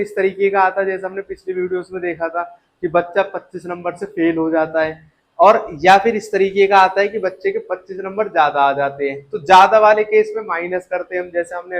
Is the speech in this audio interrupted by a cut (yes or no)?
no